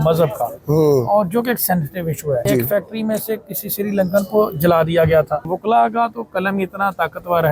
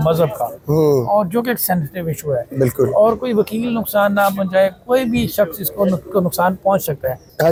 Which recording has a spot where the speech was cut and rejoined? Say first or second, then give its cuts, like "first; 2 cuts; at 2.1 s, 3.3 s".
first; 2 cuts; at 2.5 s, 5.5 s